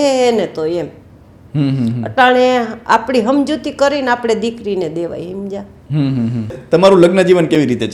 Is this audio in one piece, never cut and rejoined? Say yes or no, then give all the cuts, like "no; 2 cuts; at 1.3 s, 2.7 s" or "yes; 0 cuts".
no; 1 cut; at 6.6 s